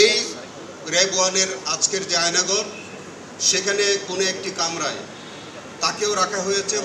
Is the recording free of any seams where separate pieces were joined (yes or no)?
yes